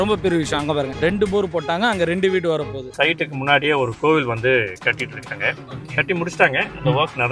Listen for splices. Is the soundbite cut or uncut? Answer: cut